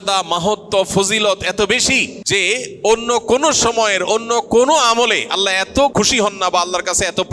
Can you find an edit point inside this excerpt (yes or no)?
yes